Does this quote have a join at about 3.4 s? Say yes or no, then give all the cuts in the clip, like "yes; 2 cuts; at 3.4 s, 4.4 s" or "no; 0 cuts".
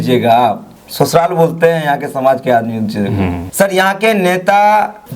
yes; 1 cut; at 3.4 s